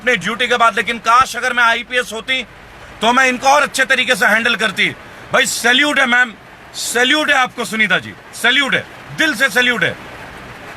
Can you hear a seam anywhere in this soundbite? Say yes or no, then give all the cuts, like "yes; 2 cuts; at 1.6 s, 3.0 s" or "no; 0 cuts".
no; 0 cuts